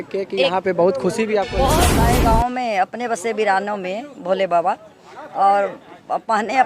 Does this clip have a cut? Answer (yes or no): yes